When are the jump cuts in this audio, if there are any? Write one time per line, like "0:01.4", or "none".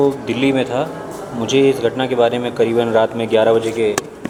none